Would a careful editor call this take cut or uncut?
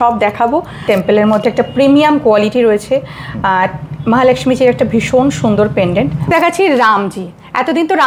cut